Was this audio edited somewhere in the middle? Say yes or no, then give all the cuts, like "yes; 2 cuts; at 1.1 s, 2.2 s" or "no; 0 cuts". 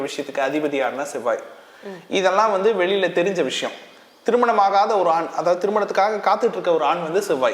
no; 0 cuts